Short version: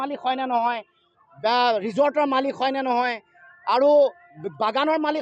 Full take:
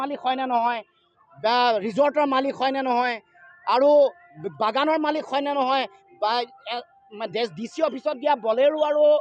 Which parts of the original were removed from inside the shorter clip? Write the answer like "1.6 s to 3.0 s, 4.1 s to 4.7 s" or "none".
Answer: none